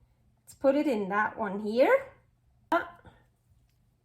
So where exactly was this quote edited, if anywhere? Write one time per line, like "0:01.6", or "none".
0:02.7